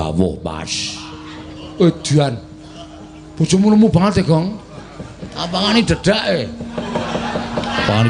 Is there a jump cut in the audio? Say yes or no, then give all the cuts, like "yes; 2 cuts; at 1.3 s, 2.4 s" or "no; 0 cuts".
no; 0 cuts